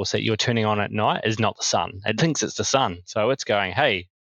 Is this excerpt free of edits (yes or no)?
yes